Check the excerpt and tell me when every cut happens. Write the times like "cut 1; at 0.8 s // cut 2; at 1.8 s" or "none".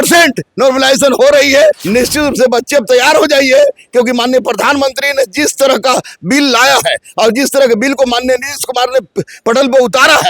cut 1; at 1.8 s